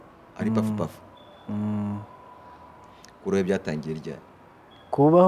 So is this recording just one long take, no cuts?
yes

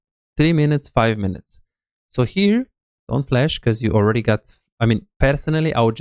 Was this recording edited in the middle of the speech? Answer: no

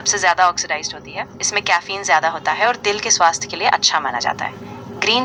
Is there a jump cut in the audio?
no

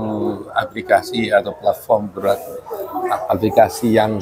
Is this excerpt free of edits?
yes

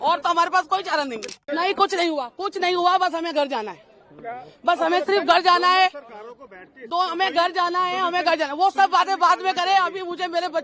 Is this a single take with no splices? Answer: no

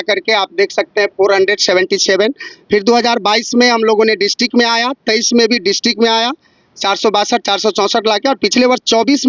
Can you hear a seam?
no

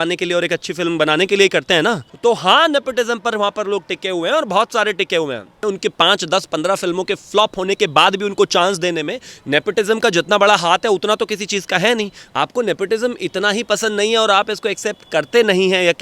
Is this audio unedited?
no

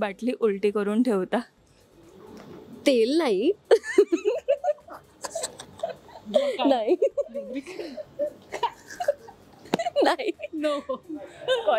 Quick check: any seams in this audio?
no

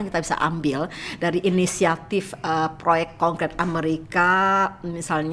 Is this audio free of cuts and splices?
yes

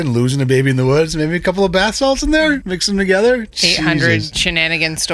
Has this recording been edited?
no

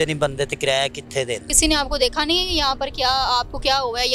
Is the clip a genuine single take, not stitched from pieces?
no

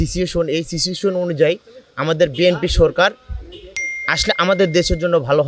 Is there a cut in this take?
no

